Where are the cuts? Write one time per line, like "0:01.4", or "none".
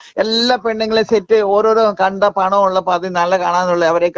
none